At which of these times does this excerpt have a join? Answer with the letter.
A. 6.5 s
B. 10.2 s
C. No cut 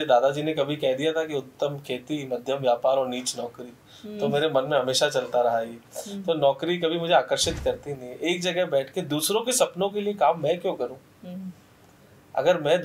C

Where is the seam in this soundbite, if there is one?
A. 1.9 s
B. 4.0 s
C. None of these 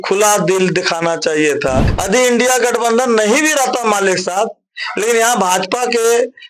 A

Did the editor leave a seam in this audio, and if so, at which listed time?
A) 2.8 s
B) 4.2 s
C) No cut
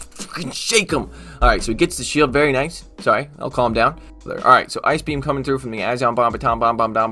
B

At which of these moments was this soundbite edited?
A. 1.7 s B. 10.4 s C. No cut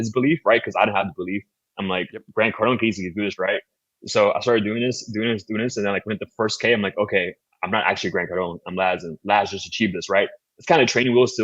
B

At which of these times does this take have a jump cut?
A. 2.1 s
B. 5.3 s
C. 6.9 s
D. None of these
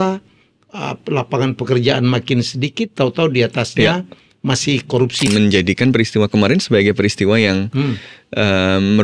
B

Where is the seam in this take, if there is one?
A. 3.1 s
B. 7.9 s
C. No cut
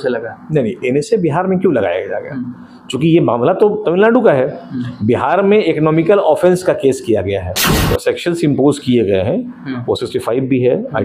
B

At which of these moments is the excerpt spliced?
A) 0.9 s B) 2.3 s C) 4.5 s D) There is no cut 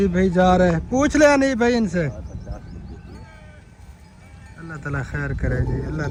D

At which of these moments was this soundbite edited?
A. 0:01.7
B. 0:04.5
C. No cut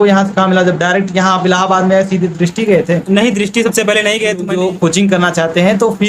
B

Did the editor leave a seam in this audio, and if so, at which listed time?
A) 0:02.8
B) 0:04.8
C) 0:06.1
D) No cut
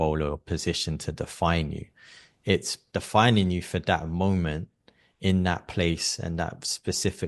A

